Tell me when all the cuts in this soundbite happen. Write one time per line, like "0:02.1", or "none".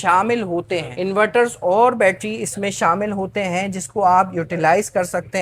none